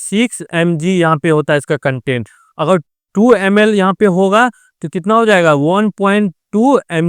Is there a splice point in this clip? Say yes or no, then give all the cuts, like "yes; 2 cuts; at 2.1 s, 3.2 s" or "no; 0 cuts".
no; 0 cuts